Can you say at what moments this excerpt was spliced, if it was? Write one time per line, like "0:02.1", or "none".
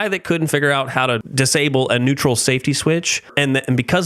0:01.3
0:03.3